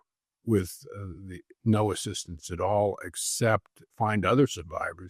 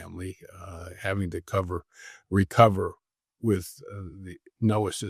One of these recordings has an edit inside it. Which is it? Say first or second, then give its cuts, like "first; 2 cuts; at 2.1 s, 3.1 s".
first; 1 cut; at 3.8 s